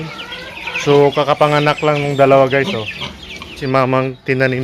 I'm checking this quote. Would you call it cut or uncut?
cut